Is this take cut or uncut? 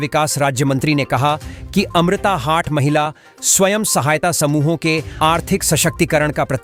uncut